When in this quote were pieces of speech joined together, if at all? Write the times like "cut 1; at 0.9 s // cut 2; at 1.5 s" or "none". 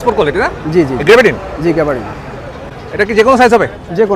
none